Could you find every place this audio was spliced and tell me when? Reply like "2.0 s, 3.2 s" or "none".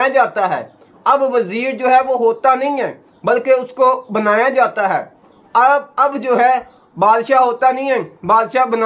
none